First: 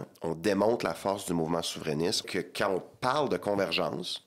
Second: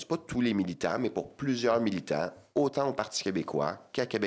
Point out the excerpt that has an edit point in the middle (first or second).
first